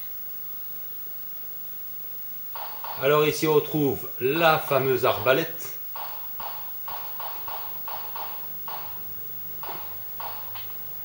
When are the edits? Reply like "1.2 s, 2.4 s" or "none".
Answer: 8.8 s